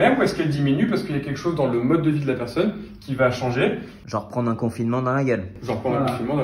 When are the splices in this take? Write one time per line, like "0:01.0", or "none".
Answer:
0:03.9